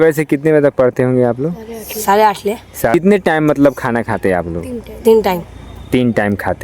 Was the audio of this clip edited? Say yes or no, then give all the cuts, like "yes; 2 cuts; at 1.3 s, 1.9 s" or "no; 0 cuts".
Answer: yes; 1 cut; at 2.9 s